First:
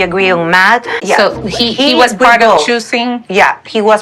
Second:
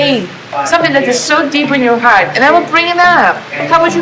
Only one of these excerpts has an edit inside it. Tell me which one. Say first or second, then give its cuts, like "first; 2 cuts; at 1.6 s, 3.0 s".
first; 1 cut; at 0.9 s